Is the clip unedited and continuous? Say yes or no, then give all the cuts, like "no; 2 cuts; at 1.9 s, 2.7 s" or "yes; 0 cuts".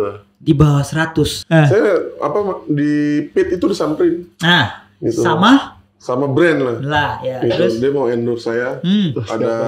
no; 1 cut; at 1.4 s